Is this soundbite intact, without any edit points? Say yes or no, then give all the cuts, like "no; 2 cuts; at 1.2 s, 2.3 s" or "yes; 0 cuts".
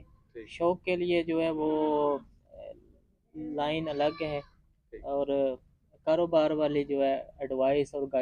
yes; 0 cuts